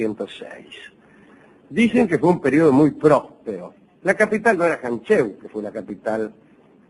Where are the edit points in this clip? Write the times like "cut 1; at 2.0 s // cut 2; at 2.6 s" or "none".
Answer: cut 1; at 4.2 s